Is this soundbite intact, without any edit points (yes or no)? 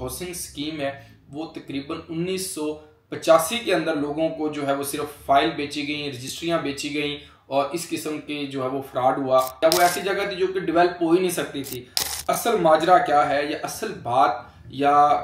no